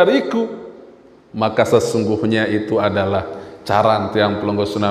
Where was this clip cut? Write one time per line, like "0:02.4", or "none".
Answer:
none